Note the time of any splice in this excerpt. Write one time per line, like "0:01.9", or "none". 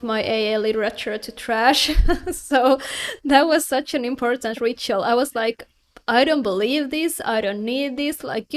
none